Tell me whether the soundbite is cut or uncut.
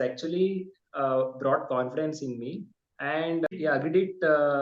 cut